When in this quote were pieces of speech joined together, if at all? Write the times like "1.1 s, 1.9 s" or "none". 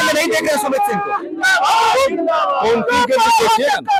none